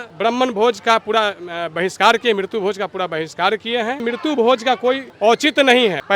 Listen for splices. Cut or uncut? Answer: cut